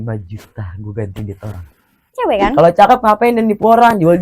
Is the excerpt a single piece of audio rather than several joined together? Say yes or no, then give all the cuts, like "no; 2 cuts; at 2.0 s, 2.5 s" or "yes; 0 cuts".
no; 1 cut; at 2.1 s